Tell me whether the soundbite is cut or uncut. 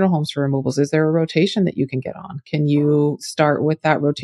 cut